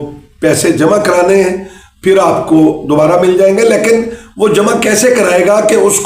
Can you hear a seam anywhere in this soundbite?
no; 0 cuts

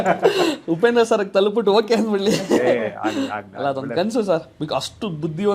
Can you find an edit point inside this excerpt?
no; 0 cuts

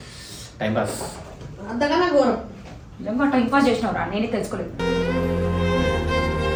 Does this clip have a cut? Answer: no; 0 cuts

